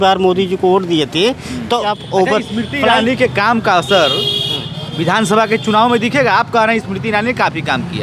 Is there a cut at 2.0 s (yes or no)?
yes